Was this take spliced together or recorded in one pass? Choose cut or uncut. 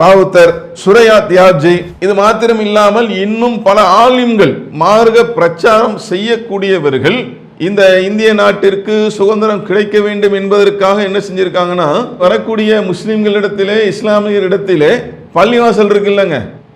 cut